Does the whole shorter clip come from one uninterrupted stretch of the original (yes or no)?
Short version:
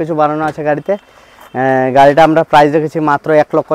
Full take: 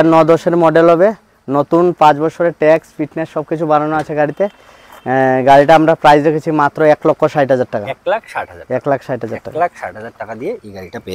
yes